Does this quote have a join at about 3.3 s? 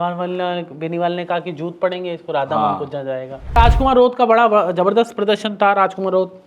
yes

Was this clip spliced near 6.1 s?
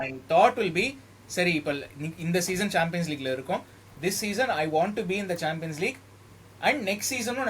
no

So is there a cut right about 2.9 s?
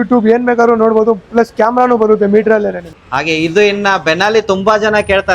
yes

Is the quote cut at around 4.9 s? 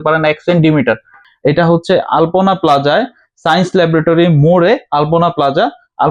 no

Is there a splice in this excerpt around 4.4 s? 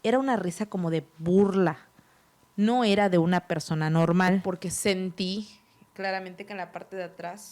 yes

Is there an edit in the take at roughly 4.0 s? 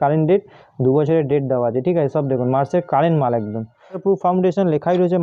yes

